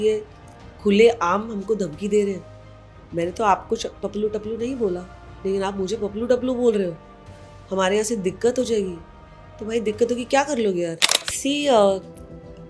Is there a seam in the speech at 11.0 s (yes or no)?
yes